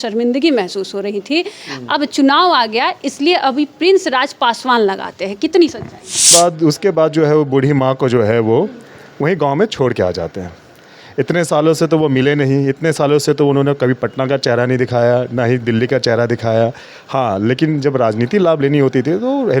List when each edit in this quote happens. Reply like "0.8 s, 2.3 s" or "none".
6.3 s